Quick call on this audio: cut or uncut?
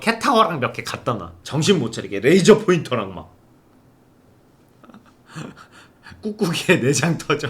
cut